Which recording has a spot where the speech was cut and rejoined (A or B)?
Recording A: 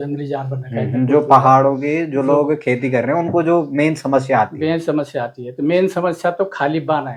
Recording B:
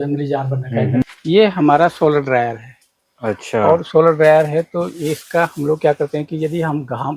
B